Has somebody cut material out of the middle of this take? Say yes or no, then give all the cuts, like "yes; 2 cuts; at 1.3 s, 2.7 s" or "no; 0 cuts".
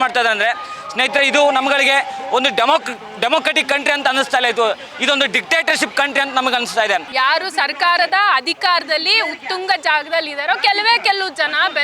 yes; 1 cut; at 7.1 s